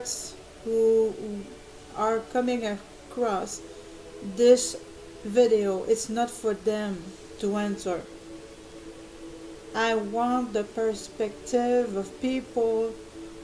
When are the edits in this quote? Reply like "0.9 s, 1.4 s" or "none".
10.5 s

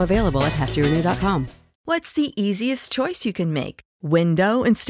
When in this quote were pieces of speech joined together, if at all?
1.7 s

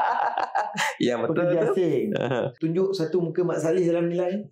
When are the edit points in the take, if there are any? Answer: 2.6 s

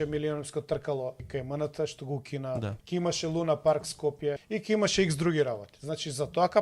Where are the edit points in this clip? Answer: 1.2 s, 2.8 s, 4.5 s

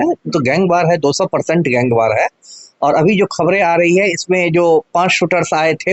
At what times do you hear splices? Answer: none

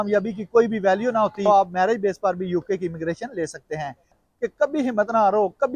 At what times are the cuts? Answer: 1.5 s, 4.2 s

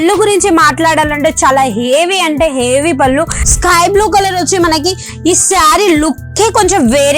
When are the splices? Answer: 3.4 s

